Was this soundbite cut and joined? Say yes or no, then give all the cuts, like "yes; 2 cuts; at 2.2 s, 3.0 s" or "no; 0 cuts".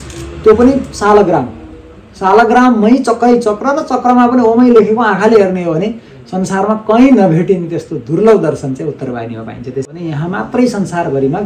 yes; 1 cut; at 9.9 s